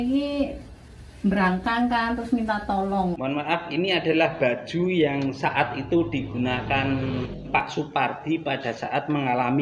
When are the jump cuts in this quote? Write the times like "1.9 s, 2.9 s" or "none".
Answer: 3.1 s, 7.3 s